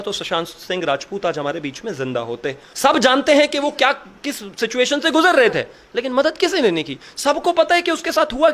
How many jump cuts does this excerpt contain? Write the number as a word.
one